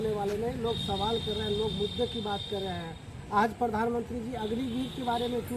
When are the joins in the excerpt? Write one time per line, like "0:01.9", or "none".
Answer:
none

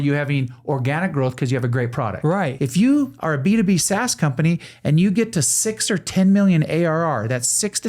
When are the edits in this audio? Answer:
0:02.5

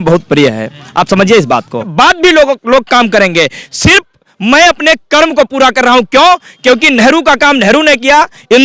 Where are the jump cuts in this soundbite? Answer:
0:01.9

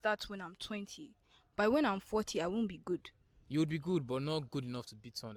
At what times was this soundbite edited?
none

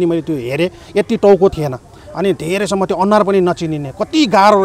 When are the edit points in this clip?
0:01.5

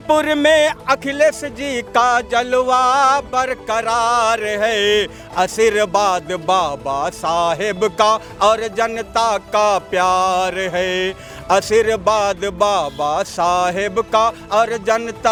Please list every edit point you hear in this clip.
none

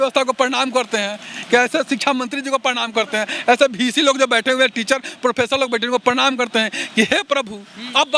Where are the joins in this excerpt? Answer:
none

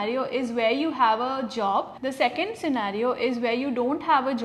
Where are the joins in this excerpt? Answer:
0:01.9

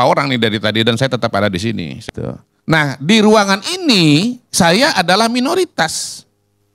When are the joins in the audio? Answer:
0:02.0

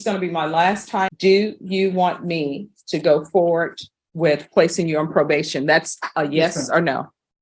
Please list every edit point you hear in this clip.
0:01.1

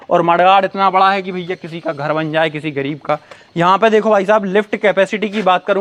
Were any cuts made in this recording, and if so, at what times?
none

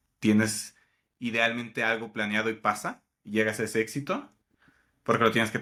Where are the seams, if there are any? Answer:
none

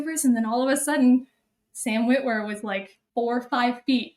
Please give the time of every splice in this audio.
0:03.0

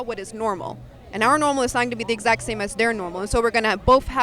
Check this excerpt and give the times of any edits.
none

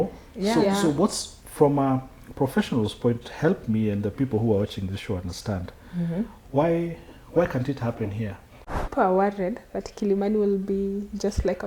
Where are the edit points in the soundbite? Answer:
0:08.9

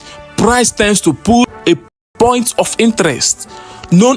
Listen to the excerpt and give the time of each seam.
0:01.6

